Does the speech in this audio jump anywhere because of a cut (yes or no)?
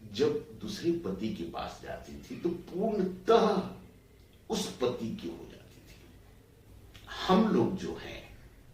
yes